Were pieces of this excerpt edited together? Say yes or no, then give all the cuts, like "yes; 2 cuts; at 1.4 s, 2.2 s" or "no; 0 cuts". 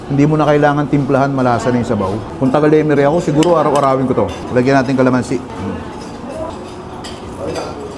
yes; 4 cuts; at 2.2 s, 4.4 s, 5.5 s, 6.5 s